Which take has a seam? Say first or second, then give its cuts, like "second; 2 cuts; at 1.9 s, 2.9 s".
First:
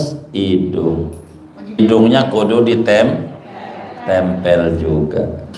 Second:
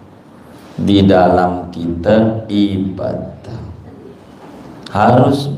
first; 1 cut; at 1.8 s